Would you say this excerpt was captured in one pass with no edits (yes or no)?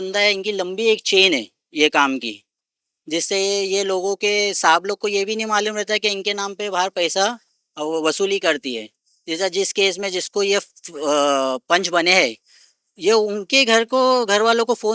yes